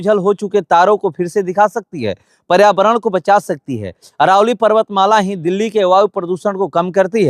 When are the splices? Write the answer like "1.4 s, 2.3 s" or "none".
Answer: none